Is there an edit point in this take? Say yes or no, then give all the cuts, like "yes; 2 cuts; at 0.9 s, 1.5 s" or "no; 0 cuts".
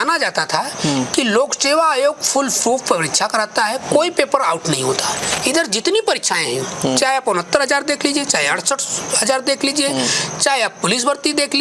yes; 1 cut; at 5.2 s